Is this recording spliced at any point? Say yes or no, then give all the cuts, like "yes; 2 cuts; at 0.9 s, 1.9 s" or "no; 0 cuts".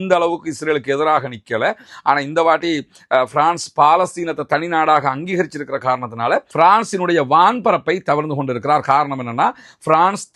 no; 0 cuts